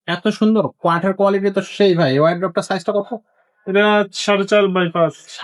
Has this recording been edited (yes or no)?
no